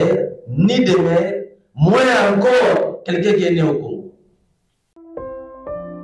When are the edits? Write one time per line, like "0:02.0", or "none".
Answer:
0:05.0